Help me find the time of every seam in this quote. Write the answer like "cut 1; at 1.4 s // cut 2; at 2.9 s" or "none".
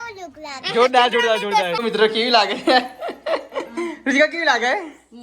cut 1; at 1.7 s